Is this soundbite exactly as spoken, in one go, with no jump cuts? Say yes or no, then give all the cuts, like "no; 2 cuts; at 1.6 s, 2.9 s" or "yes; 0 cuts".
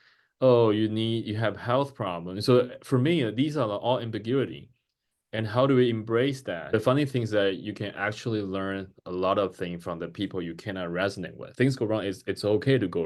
no; 2 cuts; at 6.7 s, 11.4 s